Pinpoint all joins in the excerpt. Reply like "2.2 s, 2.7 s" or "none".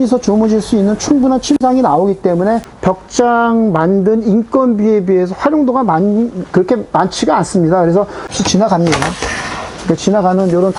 2.7 s, 8.3 s